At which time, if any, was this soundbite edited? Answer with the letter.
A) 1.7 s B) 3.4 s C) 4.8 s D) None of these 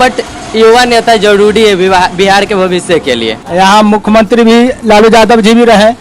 B